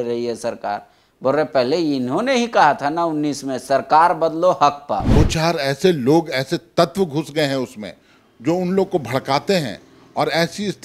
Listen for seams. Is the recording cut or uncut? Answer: cut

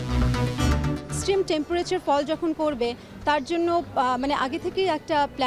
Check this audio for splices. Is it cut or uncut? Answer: cut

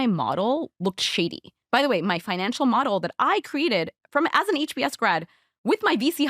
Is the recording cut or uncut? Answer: cut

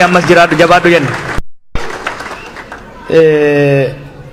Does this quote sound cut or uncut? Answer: uncut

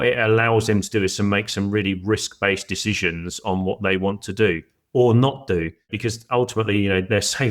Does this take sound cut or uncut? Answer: cut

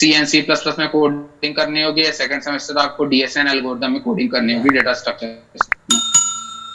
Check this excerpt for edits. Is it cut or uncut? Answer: uncut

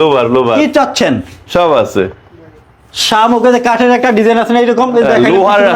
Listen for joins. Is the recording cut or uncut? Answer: uncut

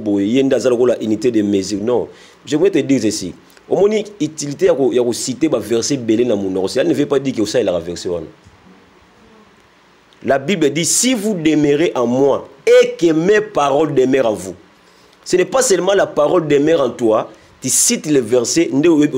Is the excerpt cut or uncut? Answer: uncut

